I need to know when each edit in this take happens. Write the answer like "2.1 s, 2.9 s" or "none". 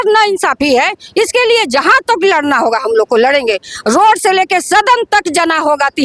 none